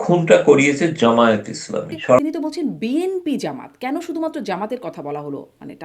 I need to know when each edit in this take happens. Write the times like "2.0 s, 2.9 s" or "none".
2.2 s